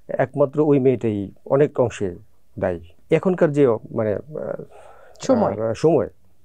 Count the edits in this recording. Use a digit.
1